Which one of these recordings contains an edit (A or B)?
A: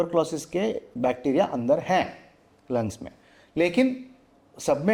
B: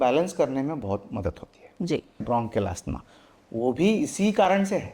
B